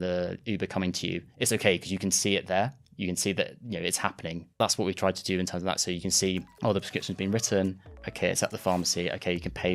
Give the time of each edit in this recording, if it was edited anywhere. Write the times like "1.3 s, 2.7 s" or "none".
4.5 s

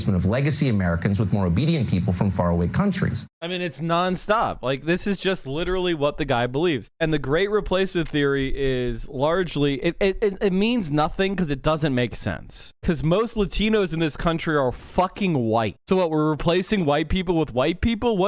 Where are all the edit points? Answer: none

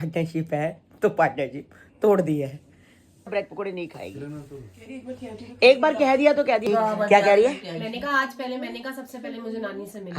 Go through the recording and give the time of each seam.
3.3 s, 6.6 s

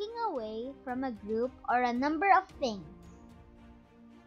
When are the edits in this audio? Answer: none

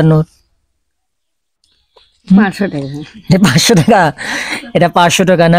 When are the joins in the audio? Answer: none

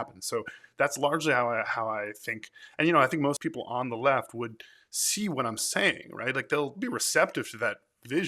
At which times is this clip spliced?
3.4 s, 6.8 s

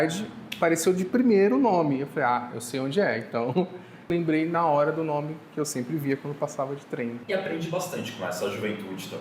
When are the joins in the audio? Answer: 4.1 s, 7.2 s

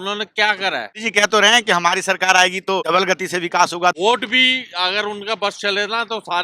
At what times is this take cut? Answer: 1.0 s, 2.9 s, 4.0 s

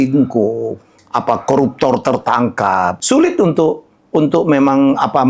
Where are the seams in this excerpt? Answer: 3.0 s

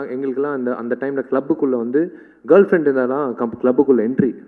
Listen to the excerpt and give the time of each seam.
none

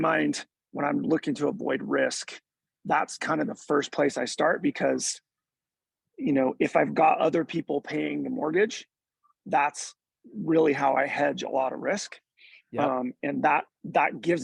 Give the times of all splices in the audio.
none

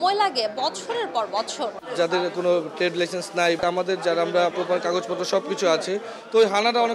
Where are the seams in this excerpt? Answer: 1.8 s, 3.6 s, 4.5 s

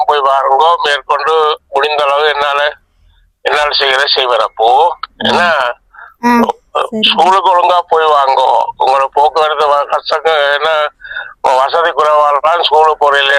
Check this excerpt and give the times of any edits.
none

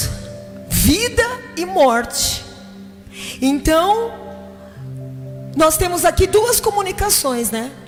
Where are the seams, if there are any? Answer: none

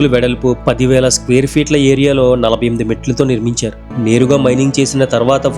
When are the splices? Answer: 3.9 s

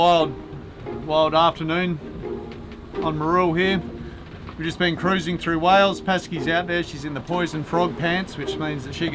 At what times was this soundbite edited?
none

